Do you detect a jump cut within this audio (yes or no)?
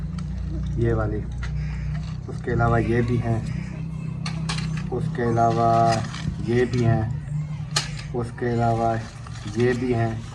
no